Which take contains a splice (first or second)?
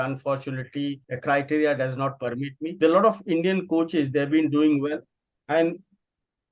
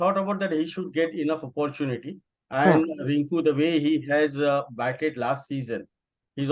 first